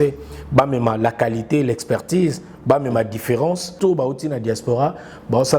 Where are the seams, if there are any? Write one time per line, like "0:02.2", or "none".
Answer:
0:03.8